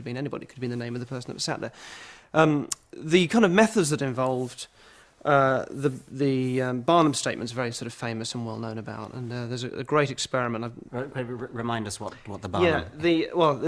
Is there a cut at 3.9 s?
no; 1 cut; at 2.4 s

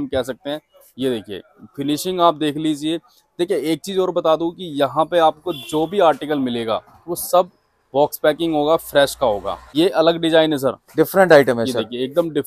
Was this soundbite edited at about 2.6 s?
no; 1 cut; at 9.6 s

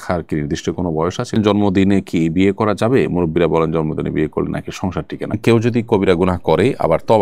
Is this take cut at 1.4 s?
yes; 2 cuts; at 1.4 s, 5.4 s

